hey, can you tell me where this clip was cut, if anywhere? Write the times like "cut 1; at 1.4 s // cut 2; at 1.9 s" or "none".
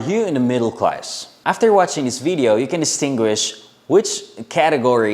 cut 1; at 1.3 s